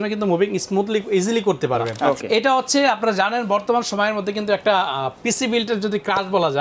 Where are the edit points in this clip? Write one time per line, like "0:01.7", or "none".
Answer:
0:02.0